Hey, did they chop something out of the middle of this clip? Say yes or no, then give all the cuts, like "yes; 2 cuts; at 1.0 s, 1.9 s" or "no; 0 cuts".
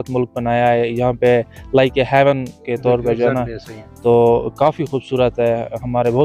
no; 0 cuts